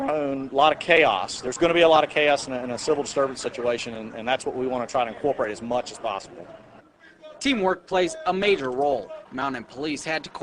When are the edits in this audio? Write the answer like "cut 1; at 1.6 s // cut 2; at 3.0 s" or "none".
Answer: cut 1; at 4.8 s

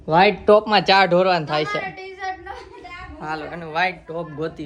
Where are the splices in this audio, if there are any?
none

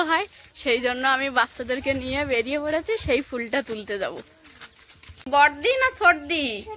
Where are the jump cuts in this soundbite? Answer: cut 1; at 5.3 s

